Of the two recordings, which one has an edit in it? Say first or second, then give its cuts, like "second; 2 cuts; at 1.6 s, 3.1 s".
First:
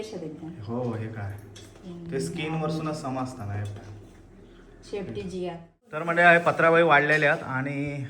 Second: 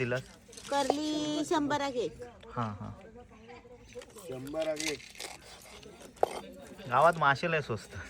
first; 1 cut; at 6.0 s